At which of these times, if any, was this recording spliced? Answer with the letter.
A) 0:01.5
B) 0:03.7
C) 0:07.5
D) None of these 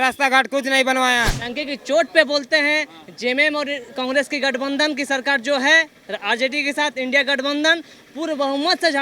A